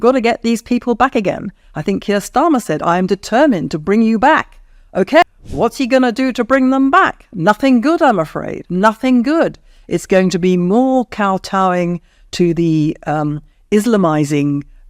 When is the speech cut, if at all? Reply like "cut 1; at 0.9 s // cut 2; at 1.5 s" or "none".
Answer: cut 1; at 5.2 s